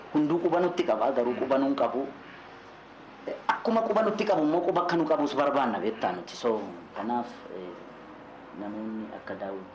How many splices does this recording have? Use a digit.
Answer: 0